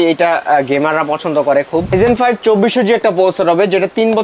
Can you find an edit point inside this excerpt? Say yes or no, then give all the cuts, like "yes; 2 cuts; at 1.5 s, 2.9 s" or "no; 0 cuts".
yes; 1 cut; at 1.9 s